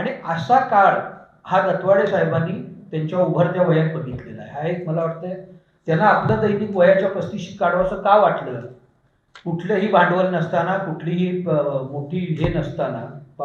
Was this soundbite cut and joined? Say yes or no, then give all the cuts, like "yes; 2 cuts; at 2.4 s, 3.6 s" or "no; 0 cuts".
no; 0 cuts